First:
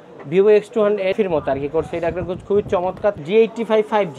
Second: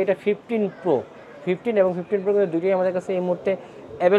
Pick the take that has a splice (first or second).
first